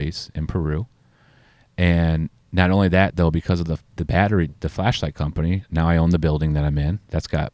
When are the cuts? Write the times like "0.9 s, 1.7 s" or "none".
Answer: none